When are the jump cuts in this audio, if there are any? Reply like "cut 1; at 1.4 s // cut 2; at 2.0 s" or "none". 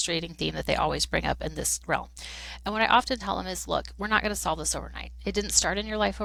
none